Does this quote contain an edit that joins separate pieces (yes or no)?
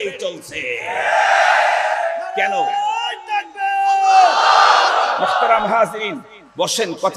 no